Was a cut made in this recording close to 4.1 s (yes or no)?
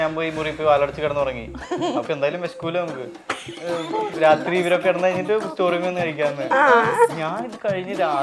yes